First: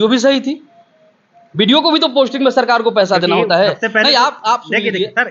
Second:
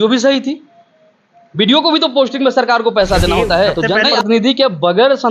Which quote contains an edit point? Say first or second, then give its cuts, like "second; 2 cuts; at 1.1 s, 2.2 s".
second; 1 cut; at 4.0 s